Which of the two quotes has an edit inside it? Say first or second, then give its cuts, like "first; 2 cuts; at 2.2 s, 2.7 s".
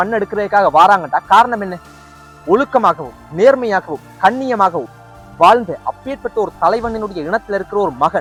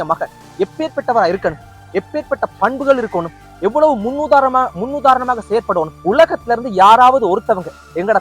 second; 1 cut; at 5.9 s